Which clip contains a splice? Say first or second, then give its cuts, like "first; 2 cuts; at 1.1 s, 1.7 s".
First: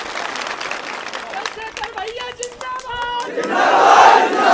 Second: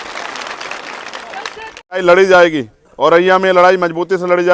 second; 1 cut; at 2.0 s